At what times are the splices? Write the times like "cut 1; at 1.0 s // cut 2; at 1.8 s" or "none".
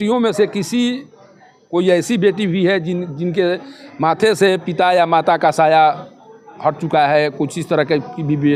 none

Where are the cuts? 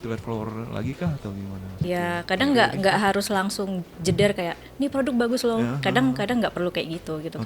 cut 1; at 1.8 s

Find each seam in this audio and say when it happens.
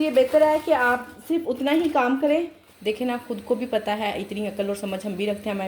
cut 1; at 2.6 s

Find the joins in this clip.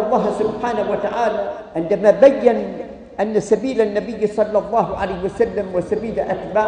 cut 1; at 1.6 s

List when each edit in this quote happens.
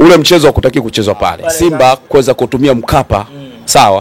cut 1; at 1.5 s

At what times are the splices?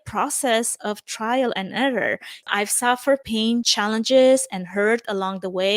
cut 1; at 2.3 s // cut 2; at 3.3 s

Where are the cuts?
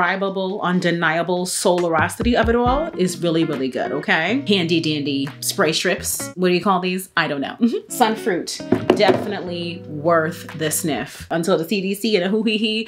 cut 1; at 4.4 s // cut 2; at 7.9 s // cut 3; at 11.3 s

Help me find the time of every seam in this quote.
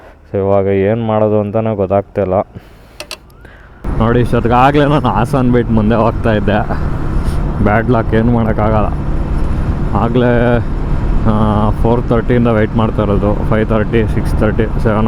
cut 1; at 3.8 s

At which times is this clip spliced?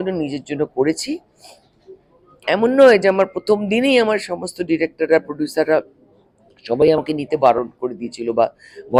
none

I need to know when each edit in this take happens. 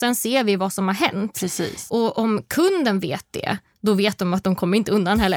cut 1; at 1.9 s

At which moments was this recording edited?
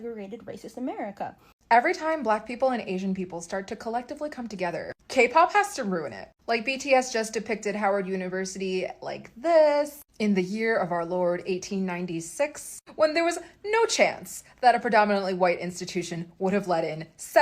cut 1; at 1.5 s

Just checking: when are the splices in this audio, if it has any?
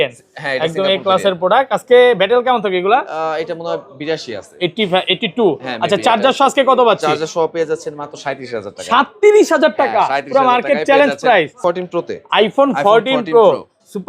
cut 1; at 11.5 s

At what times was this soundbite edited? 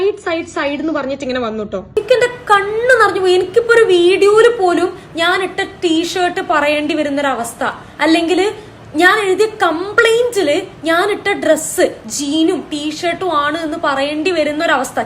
cut 1; at 1.9 s

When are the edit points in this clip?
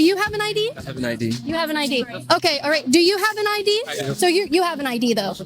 cut 1; at 4.1 s

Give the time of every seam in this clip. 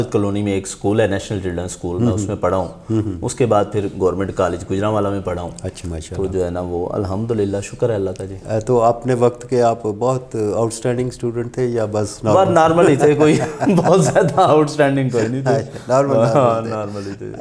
none

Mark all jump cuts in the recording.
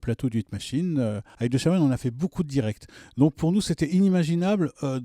cut 1; at 1.3 s

